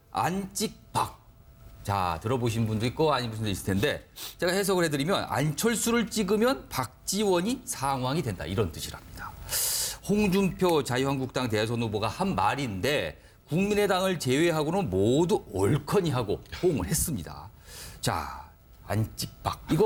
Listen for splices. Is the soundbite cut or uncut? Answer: uncut